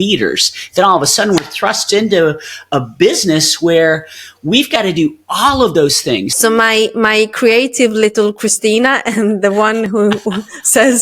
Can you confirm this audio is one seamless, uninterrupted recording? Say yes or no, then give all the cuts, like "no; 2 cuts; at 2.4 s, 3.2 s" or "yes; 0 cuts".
no; 1 cut; at 6.3 s